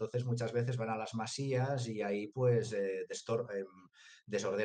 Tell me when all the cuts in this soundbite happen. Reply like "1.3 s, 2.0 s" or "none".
none